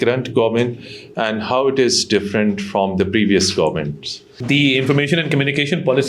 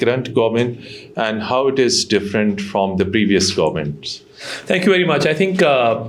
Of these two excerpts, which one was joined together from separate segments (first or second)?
first